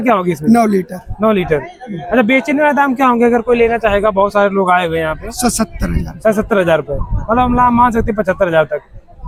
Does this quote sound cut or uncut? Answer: uncut